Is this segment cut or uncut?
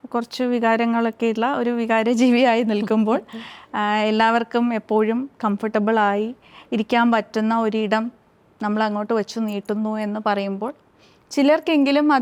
uncut